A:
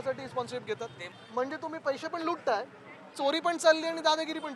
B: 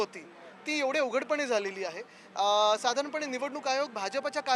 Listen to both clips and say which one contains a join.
A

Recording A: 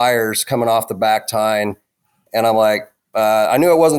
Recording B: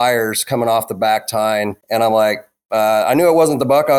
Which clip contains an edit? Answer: B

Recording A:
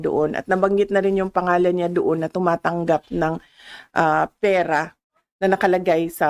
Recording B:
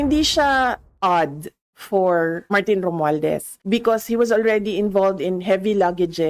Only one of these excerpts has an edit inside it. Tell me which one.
B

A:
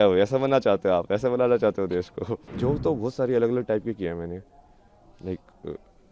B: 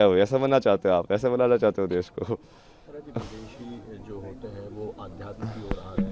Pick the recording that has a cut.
A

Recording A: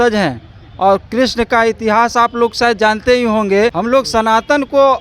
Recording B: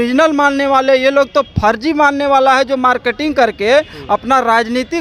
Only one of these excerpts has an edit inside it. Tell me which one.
A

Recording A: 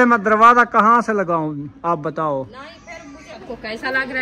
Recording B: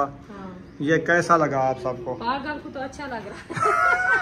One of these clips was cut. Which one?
A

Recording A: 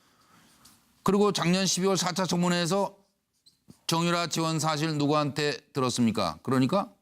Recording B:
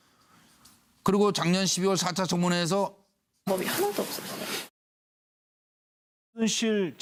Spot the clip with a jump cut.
A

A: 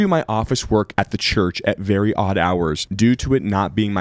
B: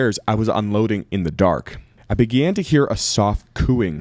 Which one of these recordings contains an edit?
A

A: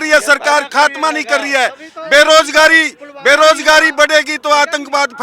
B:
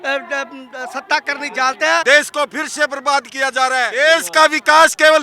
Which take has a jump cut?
B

